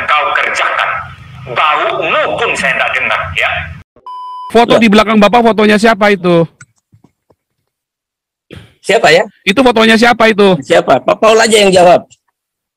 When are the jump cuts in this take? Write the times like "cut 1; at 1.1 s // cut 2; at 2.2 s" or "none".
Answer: cut 1; at 4.3 s